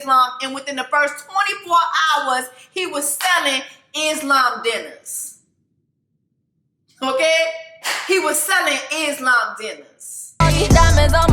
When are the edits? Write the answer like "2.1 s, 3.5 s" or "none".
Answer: 10.2 s